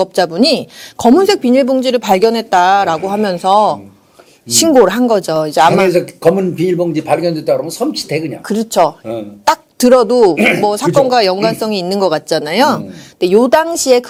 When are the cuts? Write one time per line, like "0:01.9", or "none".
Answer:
none

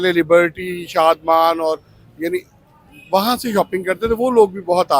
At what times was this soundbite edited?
none

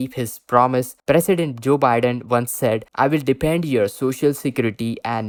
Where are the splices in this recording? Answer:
none

